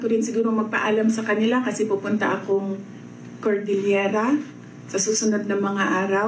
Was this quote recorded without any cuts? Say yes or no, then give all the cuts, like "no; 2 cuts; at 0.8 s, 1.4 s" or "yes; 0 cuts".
yes; 0 cuts